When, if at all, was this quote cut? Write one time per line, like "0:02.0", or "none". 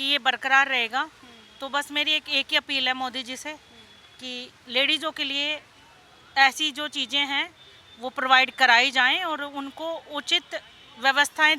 none